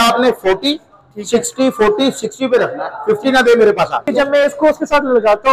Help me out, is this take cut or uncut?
cut